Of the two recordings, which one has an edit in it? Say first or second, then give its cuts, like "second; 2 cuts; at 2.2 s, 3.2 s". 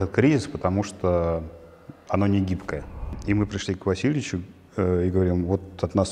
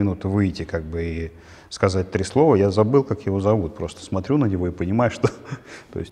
first; 1 cut; at 3.1 s